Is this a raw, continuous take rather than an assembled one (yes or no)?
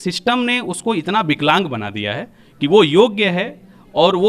yes